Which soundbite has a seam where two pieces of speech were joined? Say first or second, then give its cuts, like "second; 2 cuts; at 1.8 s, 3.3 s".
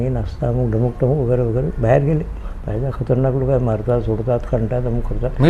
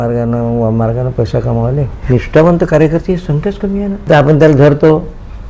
second; 2 cuts; at 1.9 s, 4.0 s